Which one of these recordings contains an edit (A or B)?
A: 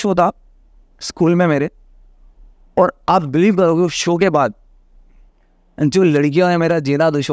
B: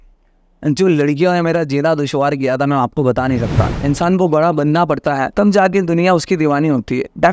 B